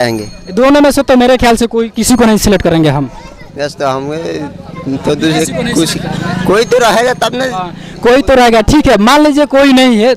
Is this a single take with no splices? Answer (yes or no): yes